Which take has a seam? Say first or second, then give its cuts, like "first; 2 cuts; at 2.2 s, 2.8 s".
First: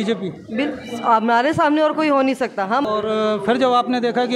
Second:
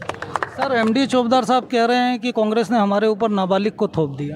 first; 1 cut; at 2.8 s